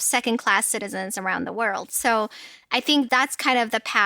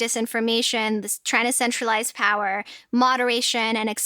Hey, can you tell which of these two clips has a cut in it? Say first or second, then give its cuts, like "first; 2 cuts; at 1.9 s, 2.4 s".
first; 1 cut; at 3.1 s